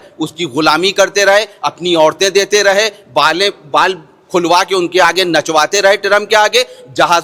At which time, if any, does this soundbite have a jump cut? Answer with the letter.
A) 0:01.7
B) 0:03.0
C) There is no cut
C